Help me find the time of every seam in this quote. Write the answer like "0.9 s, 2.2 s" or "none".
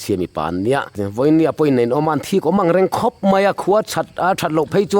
1.0 s